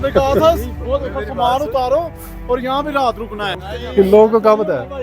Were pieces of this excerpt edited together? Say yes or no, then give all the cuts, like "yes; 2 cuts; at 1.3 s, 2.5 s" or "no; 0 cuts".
yes; 1 cut; at 3.7 s